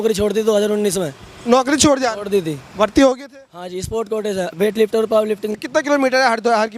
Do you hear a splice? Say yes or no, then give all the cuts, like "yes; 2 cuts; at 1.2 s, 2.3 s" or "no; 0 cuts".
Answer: yes; 1 cut; at 5.5 s